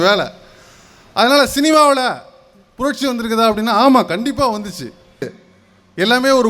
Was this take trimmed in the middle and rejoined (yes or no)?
yes